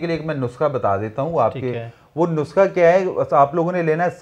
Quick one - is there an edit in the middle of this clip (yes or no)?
no